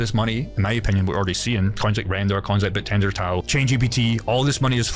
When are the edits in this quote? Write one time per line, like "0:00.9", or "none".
0:03.5